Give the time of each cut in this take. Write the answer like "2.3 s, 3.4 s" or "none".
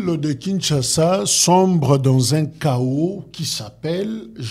none